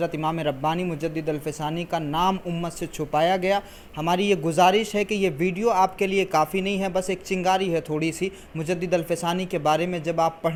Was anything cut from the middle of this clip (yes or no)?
no